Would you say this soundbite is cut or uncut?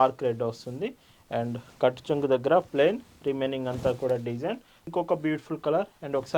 cut